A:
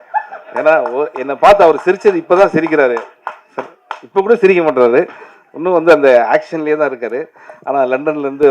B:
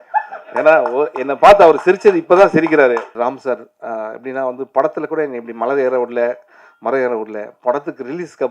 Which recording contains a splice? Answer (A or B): B